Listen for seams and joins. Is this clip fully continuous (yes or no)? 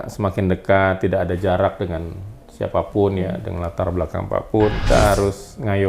no